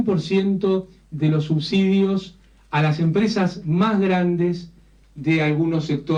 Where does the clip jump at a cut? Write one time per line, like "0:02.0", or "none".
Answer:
none